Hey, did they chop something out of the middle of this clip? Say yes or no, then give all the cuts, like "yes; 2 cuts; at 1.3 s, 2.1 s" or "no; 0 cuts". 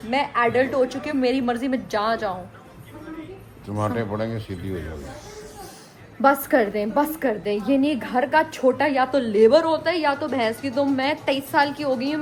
no; 0 cuts